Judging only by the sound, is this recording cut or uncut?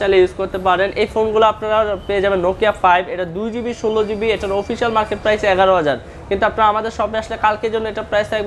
uncut